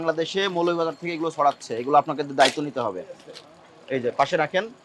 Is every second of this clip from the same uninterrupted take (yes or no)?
yes